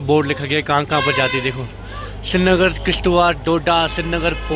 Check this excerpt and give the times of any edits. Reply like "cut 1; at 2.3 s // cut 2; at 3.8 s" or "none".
none